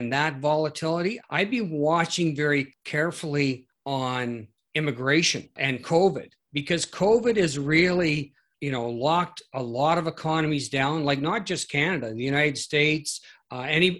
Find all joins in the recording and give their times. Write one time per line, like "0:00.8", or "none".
0:01.2
0:02.8
0:03.7
0:04.5
0:05.5
0:08.5